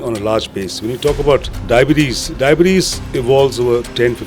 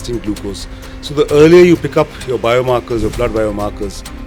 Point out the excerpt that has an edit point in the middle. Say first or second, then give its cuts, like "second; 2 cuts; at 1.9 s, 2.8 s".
first; 1 cut; at 1.5 s